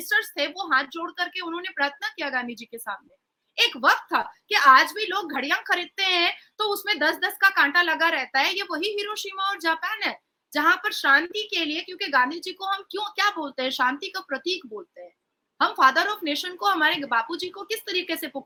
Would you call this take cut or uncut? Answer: uncut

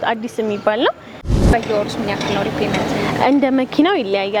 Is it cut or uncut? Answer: cut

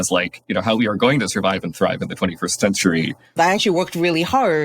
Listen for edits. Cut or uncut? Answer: cut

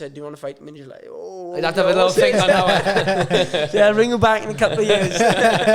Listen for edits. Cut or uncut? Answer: uncut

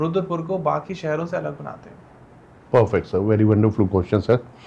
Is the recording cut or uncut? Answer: uncut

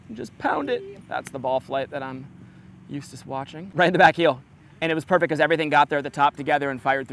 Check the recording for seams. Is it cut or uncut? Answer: cut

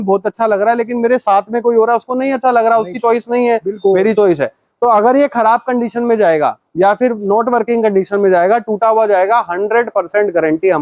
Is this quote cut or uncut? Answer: uncut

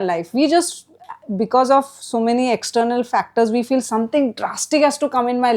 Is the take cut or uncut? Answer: uncut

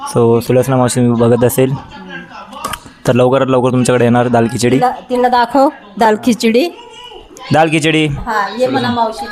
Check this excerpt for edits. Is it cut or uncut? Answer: uncut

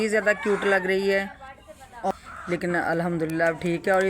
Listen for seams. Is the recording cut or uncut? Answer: cut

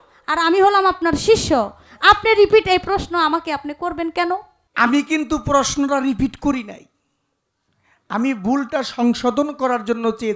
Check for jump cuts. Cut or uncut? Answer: cut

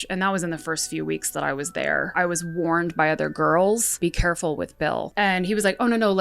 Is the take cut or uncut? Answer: cut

